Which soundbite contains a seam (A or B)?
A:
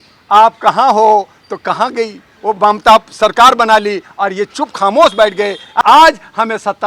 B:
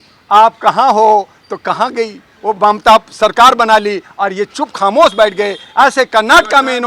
A